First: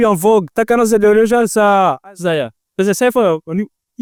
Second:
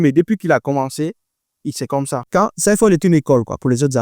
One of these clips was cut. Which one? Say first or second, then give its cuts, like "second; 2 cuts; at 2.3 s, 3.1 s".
second; 1 cut; at 2.2 s